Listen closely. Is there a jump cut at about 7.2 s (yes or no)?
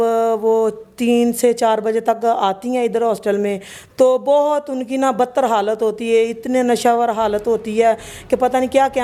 no